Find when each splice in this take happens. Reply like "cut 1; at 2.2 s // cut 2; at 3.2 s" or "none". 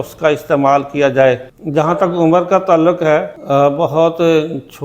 cut 1; at 1.5 s // cut 2; at 3.4 s